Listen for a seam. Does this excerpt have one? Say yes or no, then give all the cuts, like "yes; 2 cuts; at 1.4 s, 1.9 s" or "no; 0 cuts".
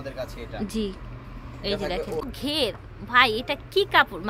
yes; 1 cut; at 2.3 s